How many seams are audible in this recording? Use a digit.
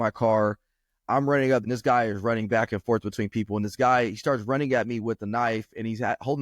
1